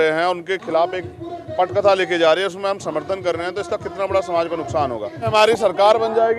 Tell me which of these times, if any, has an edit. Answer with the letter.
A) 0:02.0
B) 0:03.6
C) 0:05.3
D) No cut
C